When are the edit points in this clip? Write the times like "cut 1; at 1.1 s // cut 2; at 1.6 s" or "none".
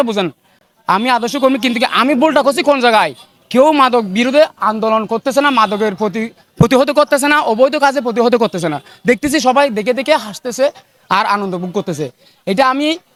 none